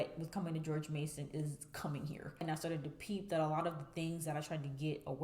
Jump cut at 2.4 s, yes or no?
yes